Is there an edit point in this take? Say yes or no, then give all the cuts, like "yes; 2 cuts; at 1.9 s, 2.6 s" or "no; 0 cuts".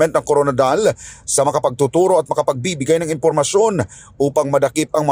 no; 0 cuts